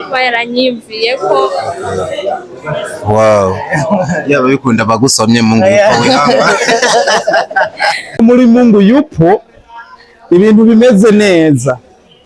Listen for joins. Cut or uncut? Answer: cut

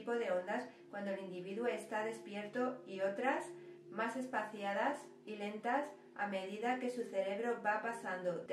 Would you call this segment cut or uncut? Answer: uncut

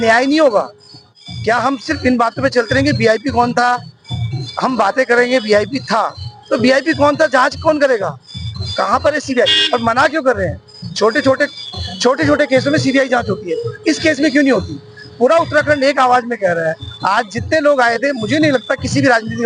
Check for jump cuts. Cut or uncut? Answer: uncut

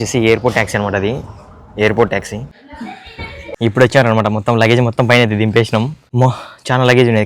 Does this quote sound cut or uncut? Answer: cut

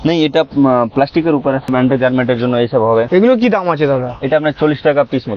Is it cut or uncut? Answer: cut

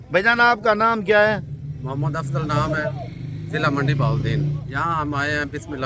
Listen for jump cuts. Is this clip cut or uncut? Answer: cut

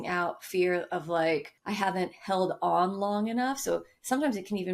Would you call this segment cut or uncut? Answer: cut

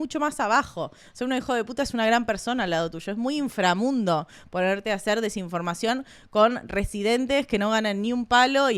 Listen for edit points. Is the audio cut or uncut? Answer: uncut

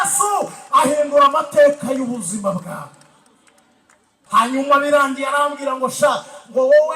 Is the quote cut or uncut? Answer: cut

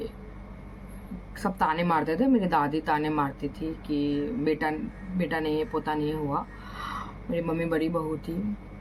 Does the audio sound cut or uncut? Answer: uncut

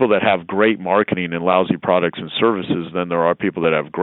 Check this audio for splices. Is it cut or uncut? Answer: uncut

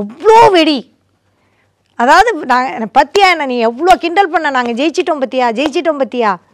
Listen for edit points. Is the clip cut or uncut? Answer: uncut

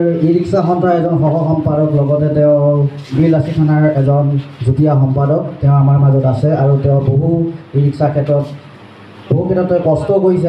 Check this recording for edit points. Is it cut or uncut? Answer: cut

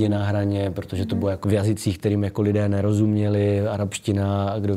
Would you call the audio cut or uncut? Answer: cut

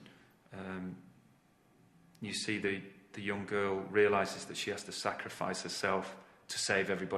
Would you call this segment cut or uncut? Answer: uncut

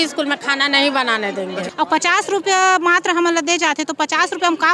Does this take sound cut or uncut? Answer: cut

